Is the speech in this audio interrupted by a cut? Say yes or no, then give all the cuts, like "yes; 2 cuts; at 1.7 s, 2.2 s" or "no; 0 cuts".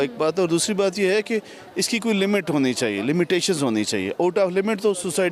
no; 0 cuts